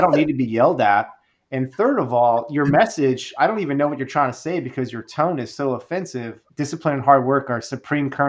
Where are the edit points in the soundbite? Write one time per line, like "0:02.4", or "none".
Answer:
0:06.4